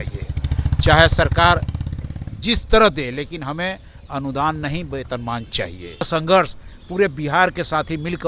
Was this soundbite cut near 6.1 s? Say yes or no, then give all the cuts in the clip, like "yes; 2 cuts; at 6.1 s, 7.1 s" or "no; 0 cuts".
yes; 1 cut; at 6.1 s